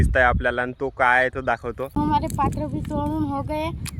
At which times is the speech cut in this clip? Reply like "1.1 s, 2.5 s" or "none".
2.0 s